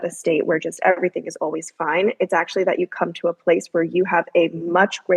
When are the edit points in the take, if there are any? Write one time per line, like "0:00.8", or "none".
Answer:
none